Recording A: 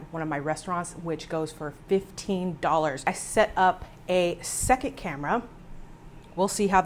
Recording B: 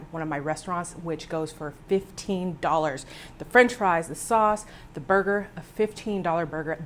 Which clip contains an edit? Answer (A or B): A